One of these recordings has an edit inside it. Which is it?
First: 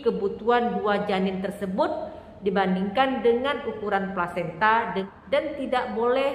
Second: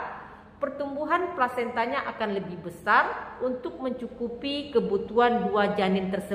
first; 1 cut; at 5.1 s

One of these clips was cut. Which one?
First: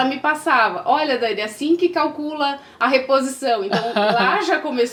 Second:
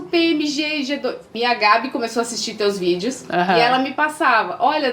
second; 1 cut; at 1.3 s

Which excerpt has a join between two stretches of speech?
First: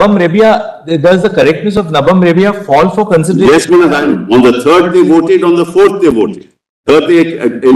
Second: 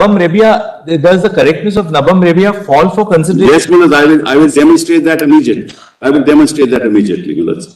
first; 1 cut; at 4.0 s

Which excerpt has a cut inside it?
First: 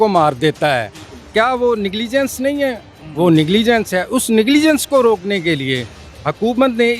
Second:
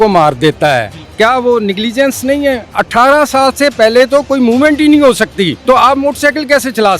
second; 3 cuts; at 1.0 s, 2.7 s, 5.6 s

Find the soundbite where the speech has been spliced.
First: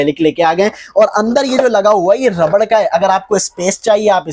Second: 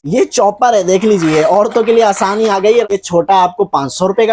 second; 1 cut; at 2.9 s

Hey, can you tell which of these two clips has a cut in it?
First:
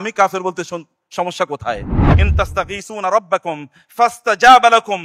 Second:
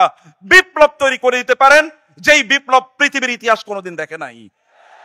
first; 1 cut; at 2.0 s

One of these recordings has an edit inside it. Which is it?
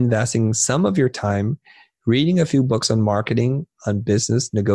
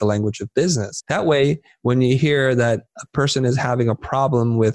second; 1 cut; at 0.9 s

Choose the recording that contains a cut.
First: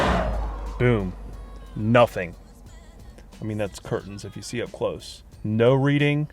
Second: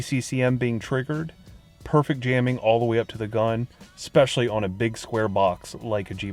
first; 1 cut; at 5.3 s

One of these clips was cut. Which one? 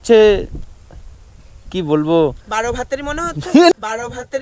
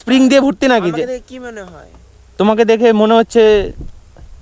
second; 1 cut; at 2.0 s

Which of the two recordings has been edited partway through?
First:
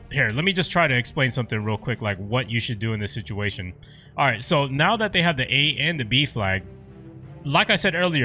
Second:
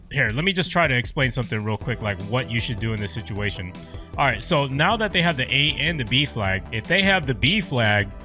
second; 1 cut; at 6.7 s

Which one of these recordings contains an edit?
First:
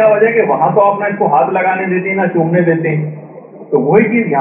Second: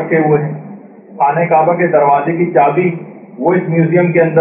first; 1 cut; at 1.3 s

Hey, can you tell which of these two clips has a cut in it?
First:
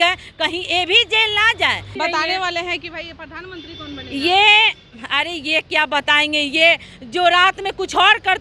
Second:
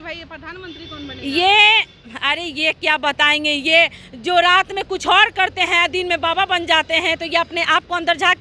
first; 1 cut; at 1.9 s

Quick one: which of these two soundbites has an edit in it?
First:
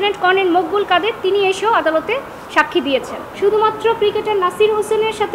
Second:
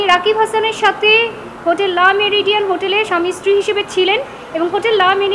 first; 1 cut; at 3.2 s

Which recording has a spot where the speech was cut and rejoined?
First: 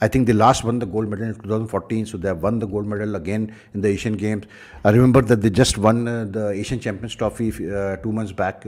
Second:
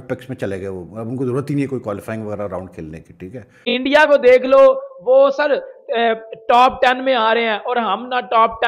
second; 1 cut; at 3.6 s

